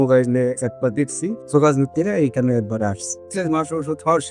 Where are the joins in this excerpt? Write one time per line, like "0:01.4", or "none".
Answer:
0:01.4
0:03.2